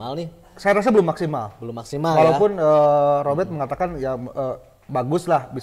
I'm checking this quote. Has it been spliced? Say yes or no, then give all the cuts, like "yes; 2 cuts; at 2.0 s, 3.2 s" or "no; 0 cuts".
no; 0 cuts